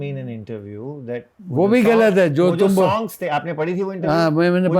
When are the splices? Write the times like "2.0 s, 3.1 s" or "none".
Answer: 1.4 s

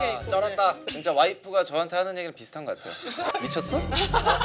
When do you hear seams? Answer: 0.8 s, 3.3 s

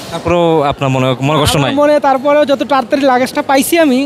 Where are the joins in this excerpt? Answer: none

